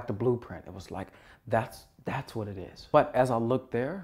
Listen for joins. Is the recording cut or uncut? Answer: cut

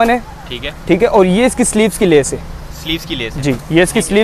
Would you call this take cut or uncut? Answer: uncut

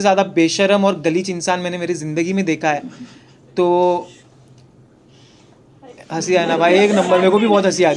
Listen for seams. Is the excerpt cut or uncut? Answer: uncut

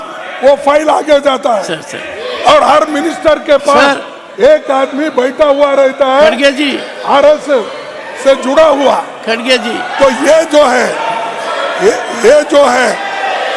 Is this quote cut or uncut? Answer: uncut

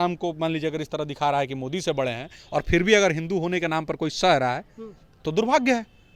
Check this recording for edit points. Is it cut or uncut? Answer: uncut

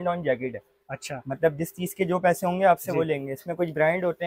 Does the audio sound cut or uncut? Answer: uncut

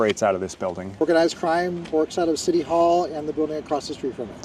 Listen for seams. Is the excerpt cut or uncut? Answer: cut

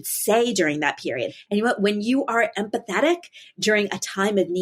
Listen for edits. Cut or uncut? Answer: cut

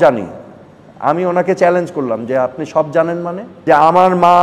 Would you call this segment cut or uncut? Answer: cut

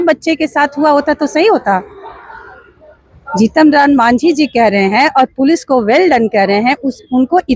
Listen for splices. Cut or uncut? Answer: uncut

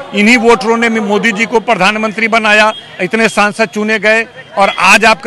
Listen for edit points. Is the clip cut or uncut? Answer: uncut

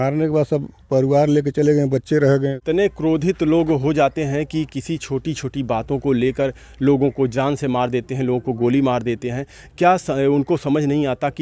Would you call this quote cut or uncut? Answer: cut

